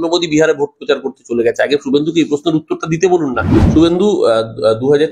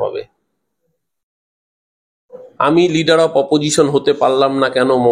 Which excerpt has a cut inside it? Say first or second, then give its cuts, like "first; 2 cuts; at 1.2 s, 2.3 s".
first; 1 cut; at 3.5 s